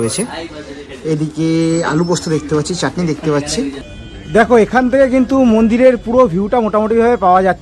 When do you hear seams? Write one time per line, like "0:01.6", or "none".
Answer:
0:03.9